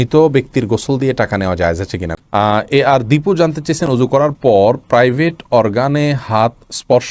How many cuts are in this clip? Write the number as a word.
one